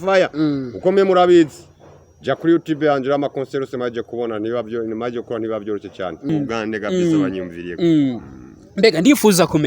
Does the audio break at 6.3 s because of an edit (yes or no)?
yes